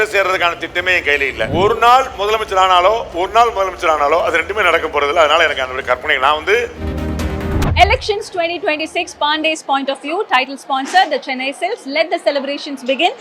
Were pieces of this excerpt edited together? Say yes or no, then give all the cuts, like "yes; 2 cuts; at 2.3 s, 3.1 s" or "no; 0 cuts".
yes; 2 cuts; at 1.5 s, 7.2 s